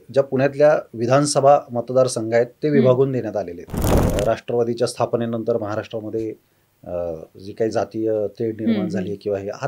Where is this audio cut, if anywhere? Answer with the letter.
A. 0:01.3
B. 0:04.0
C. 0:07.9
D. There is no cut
B